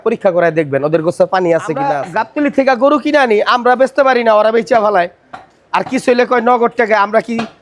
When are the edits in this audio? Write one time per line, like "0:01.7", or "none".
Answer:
0:02.0